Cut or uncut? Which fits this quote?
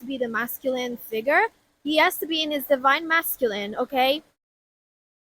uncut